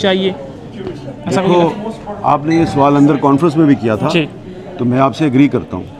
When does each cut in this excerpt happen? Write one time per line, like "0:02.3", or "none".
none